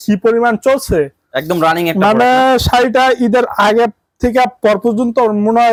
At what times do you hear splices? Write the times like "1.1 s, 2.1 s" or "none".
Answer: none